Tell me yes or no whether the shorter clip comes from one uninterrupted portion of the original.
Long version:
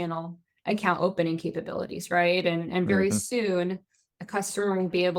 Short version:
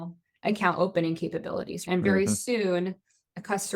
no